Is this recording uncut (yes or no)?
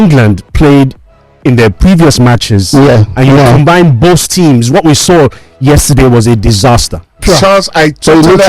no